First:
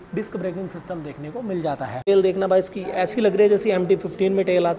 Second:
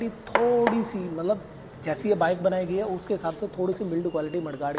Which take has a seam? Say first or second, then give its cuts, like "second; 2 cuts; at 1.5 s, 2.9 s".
first; 1 cut; at 2.1 s